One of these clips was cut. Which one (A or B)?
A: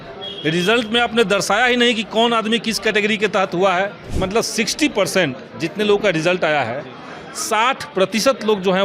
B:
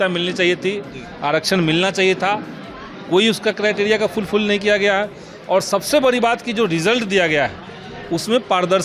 A